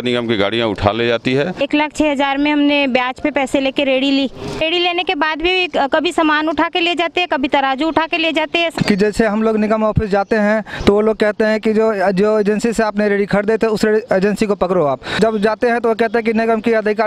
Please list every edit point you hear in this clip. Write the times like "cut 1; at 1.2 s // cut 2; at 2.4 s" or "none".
cut 1; at 1.6 s // cut 2; at 4.4 s // cut 3; at 8.7 s // cut 4; at 15.1 s